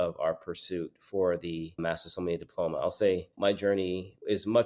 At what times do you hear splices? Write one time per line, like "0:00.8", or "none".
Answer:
0:03.3